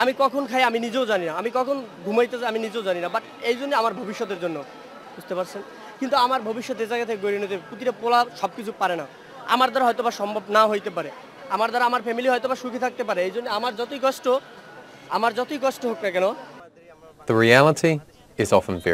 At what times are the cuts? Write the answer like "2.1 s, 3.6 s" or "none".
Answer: none